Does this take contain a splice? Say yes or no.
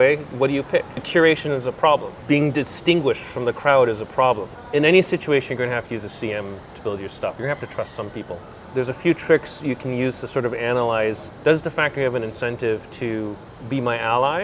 yes